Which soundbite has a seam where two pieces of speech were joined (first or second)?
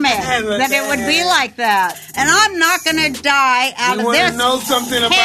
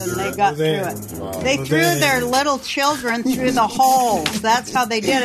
first